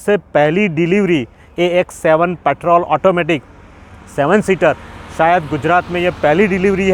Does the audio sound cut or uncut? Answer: uncut